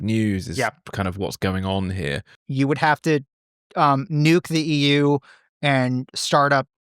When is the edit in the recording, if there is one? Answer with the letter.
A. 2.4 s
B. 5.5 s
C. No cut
A